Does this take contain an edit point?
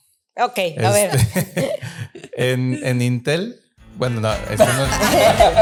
no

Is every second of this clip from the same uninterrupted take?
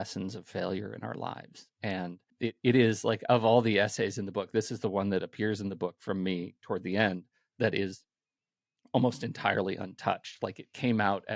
yes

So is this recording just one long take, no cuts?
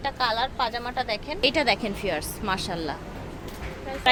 yes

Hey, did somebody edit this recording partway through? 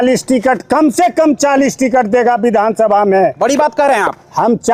no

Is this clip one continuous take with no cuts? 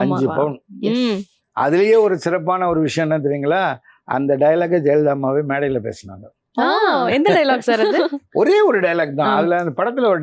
yes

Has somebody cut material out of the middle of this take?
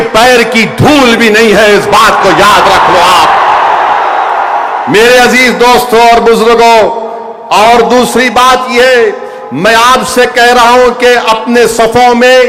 no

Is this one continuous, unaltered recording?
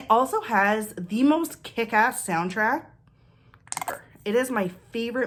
yes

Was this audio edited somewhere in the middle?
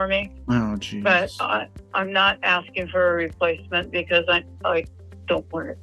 no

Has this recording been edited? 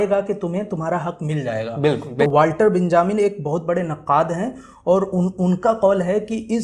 yes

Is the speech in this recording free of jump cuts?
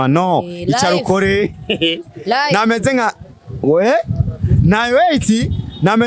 yes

